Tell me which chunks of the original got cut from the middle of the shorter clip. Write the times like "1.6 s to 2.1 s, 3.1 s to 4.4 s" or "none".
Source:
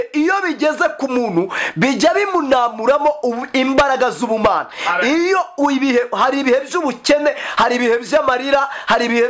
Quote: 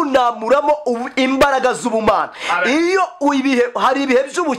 none

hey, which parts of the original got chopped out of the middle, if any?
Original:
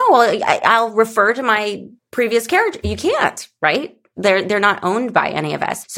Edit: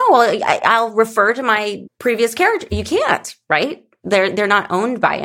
1.9 s to 2.0 s

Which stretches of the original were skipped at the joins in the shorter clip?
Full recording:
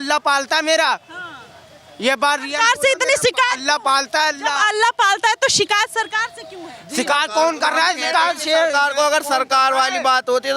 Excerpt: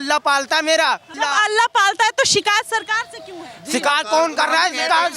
1.1 s to 4.4 s

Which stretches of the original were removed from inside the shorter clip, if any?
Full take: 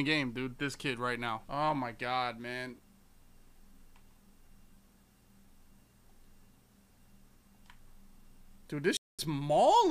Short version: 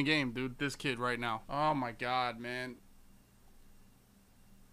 2.8 s to 5.4 s

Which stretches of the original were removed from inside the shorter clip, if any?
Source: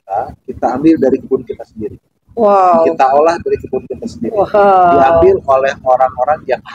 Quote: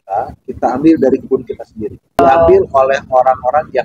2.2 s to 4.9 s

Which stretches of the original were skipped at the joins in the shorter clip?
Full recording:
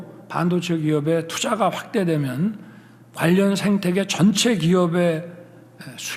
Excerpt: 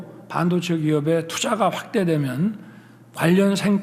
none

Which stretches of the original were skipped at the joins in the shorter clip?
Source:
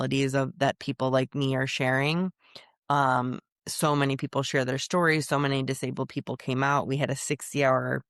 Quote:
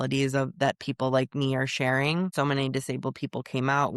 2.3 s to 5.3 s

